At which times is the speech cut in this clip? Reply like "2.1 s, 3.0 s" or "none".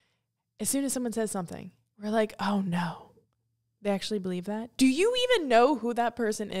none